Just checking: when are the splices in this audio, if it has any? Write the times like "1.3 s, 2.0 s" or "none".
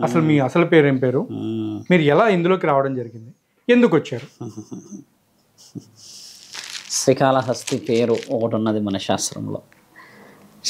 none